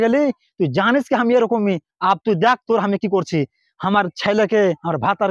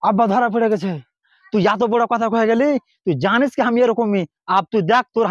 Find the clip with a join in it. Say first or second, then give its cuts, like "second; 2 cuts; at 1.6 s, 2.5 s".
second; 1 cut; at 0.9 s